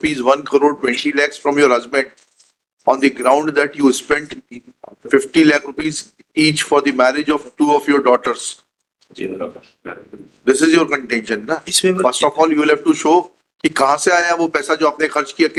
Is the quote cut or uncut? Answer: uncut